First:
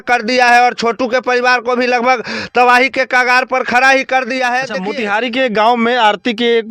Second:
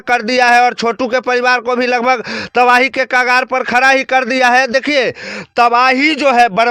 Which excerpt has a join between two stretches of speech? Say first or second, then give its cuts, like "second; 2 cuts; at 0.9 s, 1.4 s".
first; 1 cut; at 4.8 s